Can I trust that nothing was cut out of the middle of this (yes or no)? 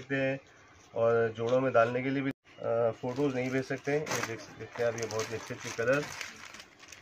no